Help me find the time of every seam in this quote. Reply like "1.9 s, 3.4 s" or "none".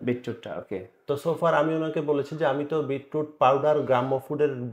none